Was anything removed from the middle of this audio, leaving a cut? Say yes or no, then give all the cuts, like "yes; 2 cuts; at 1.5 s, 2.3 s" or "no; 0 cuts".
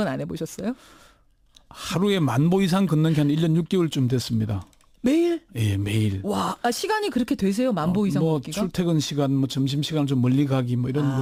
no; 0 cuts